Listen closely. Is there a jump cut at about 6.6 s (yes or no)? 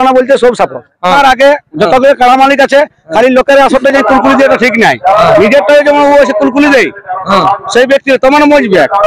no